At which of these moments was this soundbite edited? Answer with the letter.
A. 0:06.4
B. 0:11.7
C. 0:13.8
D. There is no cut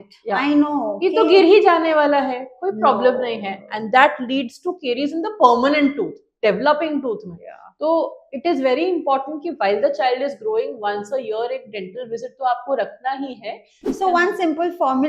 C